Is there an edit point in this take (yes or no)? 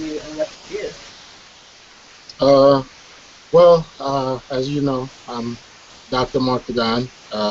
no